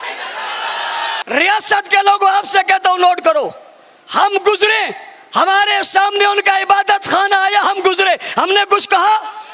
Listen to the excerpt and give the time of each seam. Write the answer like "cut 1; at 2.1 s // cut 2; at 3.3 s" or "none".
cut 1; at 1.2 s